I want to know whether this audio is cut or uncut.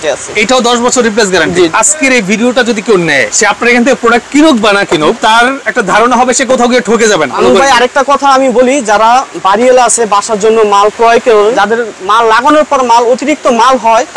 cut